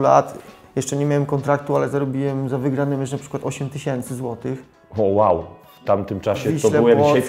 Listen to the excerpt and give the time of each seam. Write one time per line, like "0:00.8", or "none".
none